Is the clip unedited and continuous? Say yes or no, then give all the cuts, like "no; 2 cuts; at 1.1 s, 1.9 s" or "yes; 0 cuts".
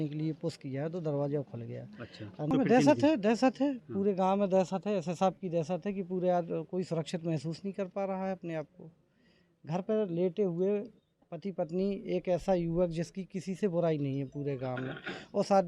no; 1 cut; at 2.5 s